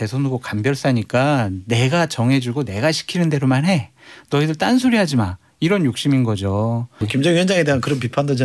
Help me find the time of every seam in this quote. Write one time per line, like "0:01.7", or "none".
0:07.0